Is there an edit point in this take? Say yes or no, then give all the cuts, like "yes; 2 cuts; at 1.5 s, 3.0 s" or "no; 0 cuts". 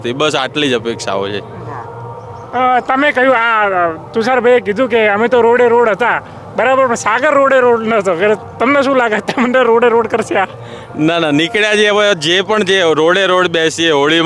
no; 0 cuts